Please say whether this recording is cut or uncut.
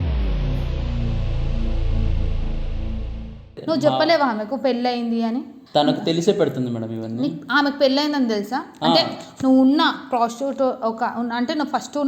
cut